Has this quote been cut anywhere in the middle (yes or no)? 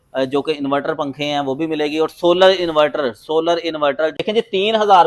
yes